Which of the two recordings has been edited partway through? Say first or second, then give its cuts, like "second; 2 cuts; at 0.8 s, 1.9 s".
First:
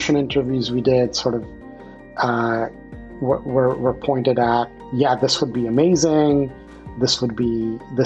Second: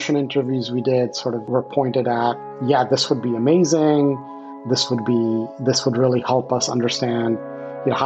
second; 1 cut; at 1.5 s